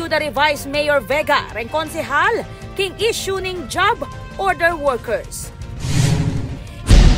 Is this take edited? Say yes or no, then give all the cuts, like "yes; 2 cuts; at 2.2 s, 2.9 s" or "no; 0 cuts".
no; 0 cuts